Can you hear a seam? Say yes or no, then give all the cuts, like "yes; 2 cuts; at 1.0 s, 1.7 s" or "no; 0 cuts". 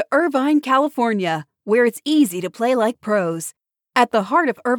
no; 0 cuts